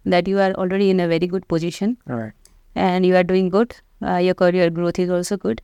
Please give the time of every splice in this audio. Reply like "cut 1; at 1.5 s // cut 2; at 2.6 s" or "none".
none